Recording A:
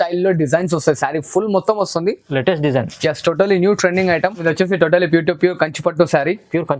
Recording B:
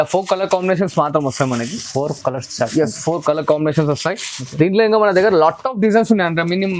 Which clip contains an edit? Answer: A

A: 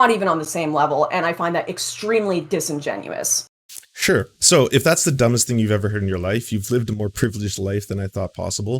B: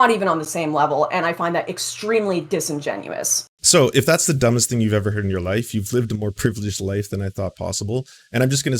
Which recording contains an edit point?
B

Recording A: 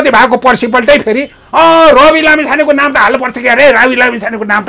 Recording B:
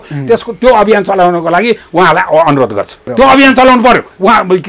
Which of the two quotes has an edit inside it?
B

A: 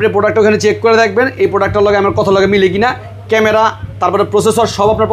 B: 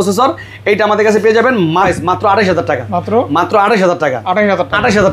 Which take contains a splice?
B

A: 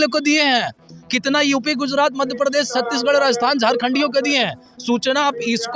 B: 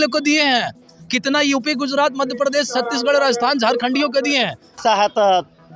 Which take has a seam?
B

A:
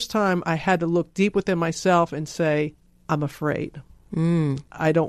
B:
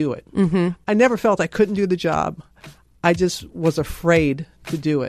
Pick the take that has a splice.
A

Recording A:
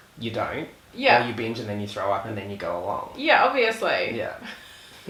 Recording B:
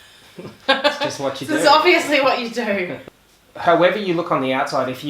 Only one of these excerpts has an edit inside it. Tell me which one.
B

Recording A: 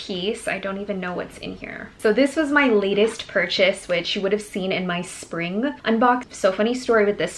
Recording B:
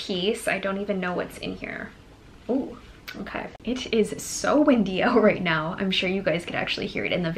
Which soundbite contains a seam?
A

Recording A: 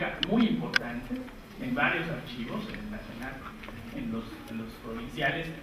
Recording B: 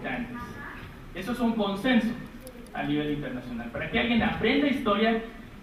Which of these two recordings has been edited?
A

